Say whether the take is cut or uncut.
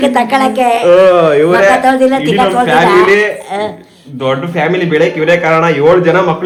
uncut